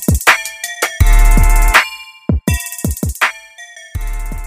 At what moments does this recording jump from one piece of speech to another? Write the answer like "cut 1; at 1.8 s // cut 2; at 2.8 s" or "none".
cut 1; at 0.9 s